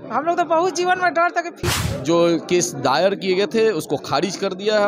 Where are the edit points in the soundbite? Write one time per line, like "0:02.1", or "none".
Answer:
0:01.6